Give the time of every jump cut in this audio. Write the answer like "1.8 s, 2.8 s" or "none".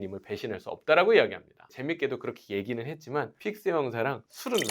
1.7 s